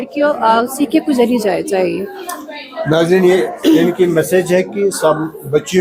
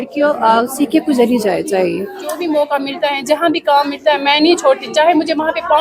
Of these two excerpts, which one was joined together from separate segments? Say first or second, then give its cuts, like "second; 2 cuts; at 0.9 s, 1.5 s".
second; 1 cut; at 2.4 s